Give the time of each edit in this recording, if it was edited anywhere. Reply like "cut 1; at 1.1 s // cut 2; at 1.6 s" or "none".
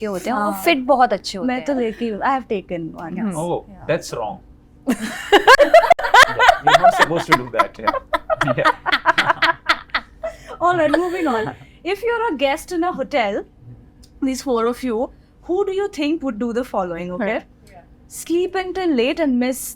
none